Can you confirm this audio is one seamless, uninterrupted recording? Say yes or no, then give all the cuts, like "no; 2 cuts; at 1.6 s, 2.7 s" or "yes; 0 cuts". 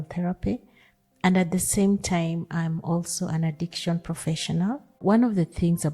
no; 1 cut; at 5.0 s